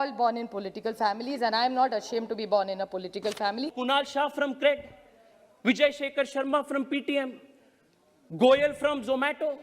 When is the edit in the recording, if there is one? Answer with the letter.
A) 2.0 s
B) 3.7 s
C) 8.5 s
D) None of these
B